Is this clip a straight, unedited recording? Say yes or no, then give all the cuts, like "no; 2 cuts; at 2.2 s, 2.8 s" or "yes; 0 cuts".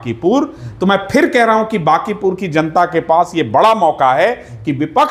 yes; 0 cuts